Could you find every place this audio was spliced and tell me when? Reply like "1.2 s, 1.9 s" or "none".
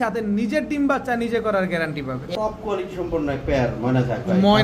2.3 s

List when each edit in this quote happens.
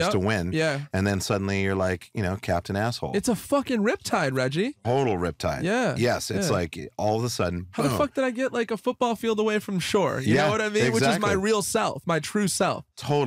none

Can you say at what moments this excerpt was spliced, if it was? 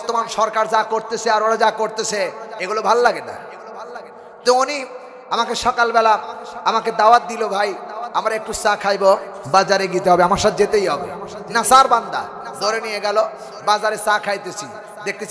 none

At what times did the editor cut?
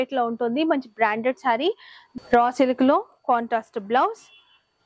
1.8 s

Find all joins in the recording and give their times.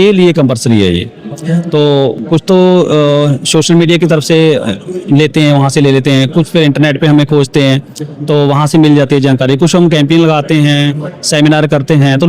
none

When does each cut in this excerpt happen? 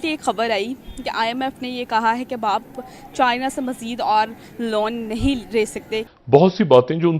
6.0 s

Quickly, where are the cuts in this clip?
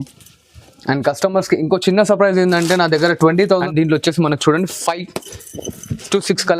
3.6 s

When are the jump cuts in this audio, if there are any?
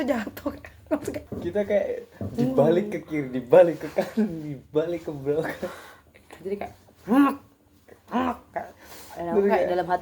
1.3 s

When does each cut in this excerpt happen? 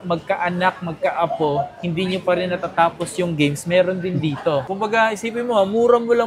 4.6 s

